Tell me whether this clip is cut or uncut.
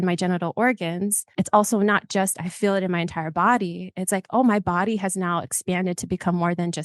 cut